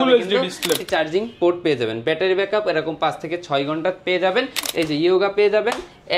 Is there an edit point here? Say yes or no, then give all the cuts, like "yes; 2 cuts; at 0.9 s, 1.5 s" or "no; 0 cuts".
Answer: yes; 2 cuts; at 0.8 s, 4.6 s